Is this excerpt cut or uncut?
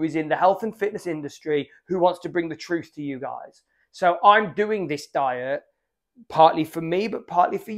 uncut